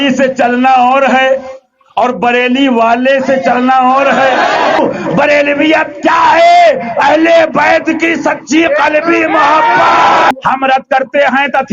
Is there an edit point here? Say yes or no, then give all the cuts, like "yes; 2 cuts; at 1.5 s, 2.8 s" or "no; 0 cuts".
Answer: yes; 2 cuts; at 4.8 s, 10.3 s